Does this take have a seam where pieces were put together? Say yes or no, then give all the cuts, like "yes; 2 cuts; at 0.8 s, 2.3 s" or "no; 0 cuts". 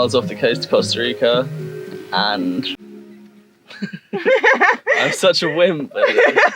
yes; 1 cut; at 2.8 s